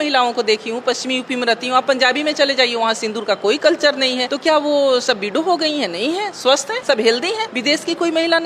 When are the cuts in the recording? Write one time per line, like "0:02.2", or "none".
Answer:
0:04.3
0:06.7
0:07.5